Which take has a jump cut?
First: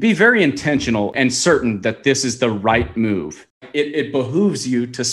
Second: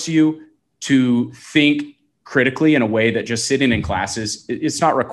first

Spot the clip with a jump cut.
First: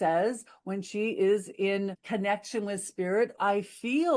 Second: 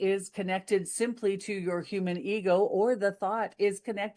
first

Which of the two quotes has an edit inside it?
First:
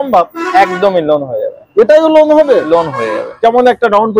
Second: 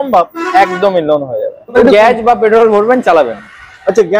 second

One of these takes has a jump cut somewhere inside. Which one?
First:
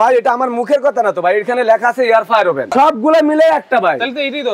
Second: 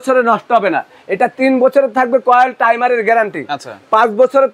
first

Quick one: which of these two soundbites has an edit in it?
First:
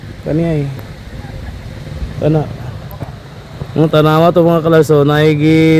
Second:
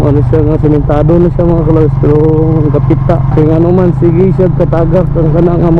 second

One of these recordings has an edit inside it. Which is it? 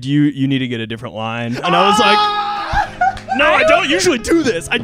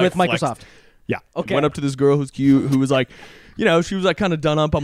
second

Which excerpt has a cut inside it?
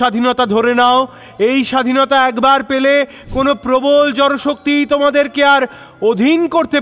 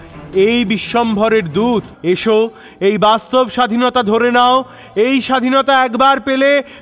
second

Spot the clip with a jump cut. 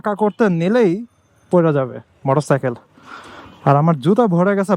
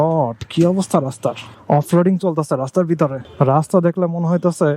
second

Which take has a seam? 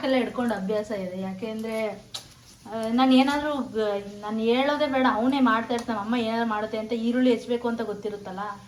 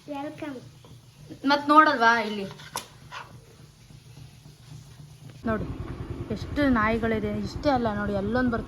second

